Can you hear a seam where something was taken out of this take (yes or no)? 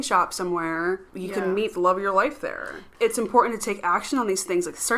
yes